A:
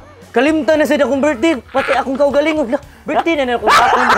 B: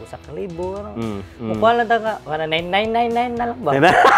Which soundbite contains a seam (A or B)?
B